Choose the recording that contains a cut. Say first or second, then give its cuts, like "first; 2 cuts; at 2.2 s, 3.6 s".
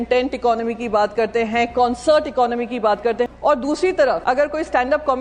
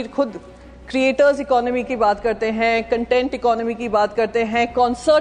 first; 2 cuts; at 3.3 s, 4.2 s